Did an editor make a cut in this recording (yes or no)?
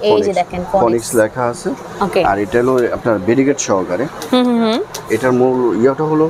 no